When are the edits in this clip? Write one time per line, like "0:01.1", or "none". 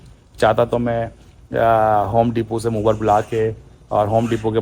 none